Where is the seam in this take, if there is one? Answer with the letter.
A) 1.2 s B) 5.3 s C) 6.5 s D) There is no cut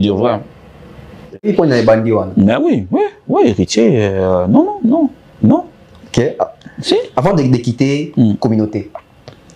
A